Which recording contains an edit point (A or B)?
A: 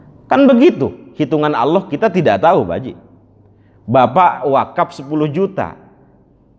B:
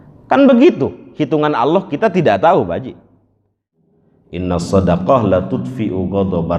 B